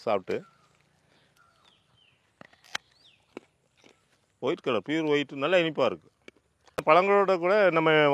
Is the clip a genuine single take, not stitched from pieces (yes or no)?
no